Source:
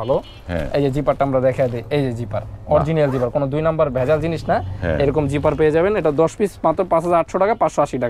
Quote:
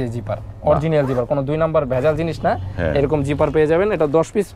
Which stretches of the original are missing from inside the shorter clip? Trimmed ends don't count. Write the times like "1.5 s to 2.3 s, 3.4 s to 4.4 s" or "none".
none